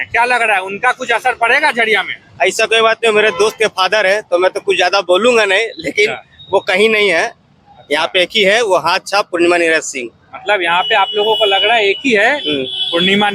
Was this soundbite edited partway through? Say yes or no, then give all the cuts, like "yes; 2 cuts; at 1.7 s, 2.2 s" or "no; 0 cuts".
no; 0 cuts